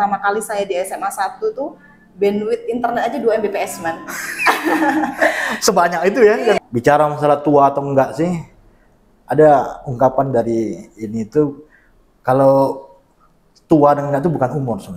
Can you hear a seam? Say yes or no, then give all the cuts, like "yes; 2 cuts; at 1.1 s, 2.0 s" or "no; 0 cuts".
yes; 1 cut; at 6.6 s